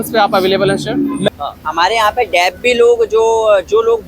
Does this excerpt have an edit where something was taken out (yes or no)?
yes